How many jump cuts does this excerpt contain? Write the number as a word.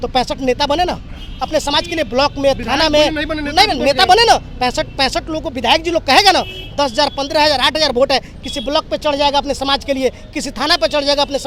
zero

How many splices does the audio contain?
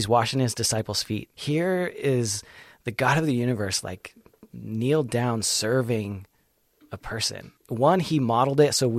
two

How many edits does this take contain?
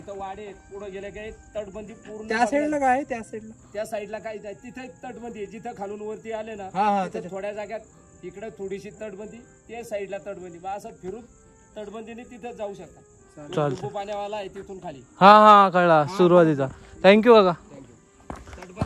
zero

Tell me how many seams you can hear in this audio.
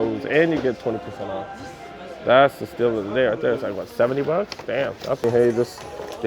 one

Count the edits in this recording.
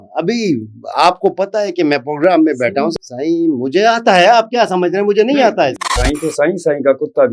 two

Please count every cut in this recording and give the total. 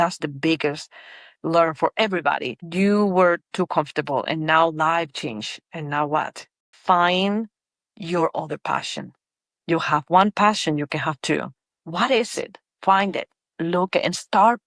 one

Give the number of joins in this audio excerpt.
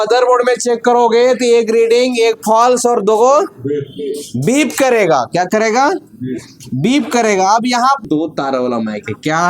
one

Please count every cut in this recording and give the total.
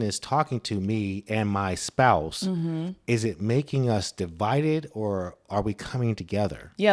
zero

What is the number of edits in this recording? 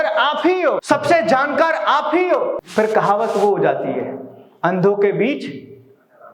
two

